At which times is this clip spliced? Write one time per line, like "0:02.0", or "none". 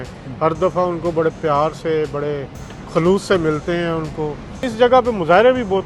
0:04.7